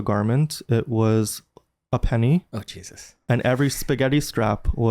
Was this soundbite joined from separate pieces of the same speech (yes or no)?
no